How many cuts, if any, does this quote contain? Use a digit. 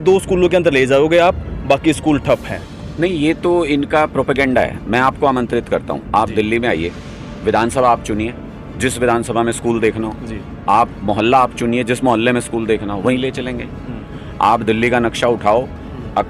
1